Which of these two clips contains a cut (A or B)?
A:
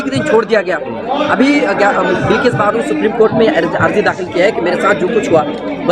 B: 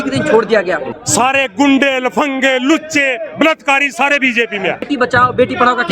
B